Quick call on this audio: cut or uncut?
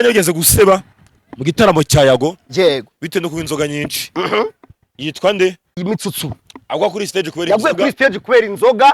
cut